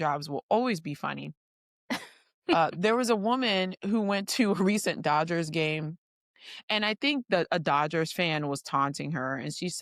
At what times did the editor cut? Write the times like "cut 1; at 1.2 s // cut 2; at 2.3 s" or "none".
none

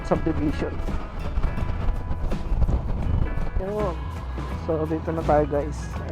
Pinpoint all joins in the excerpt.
cut 1; at 3.6 s

